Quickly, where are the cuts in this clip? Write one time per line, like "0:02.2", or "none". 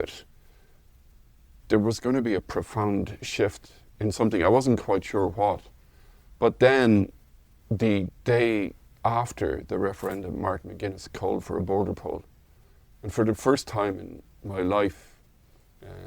0:01.6